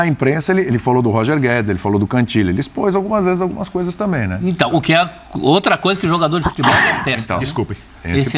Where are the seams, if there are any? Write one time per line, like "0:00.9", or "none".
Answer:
none